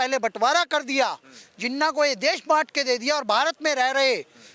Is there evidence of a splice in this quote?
no; 0 cuts

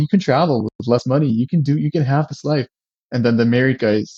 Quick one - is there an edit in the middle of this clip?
no; 0 cuts

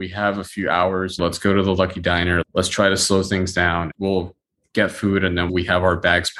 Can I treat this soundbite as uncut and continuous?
no; 3 cuts; at 1.2 s, 3.8 s, 5.5 s

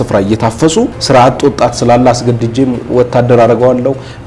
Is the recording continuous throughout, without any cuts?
no; 1 cut; at 1.0 s

